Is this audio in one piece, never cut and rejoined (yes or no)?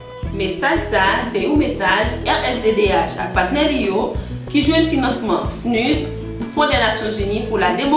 no